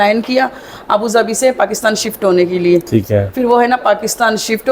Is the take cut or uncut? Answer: uncut